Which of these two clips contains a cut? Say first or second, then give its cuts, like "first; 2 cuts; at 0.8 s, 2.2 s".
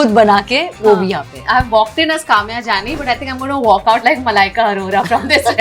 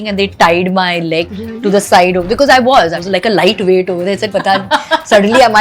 second; 2 cuts; at 1.3 s, 3.0 s